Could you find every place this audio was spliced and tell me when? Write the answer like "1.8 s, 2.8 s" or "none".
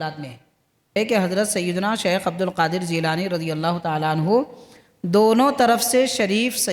1.0 s